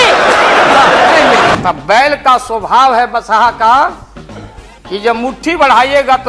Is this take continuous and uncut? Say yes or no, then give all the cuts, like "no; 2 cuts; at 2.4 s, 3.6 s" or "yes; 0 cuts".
no; 1 cut; at 1.5 s